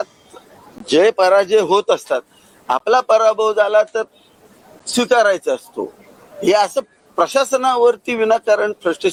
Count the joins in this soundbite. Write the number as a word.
zero